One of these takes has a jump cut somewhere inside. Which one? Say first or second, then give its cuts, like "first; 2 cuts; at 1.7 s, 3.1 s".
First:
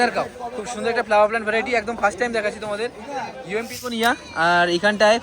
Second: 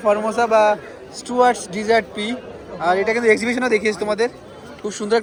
first; 1 cut; at 3.9 s